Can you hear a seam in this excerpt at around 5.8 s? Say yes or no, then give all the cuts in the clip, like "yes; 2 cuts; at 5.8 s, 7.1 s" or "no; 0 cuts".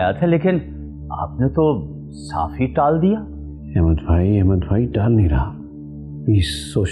no; 0 cuts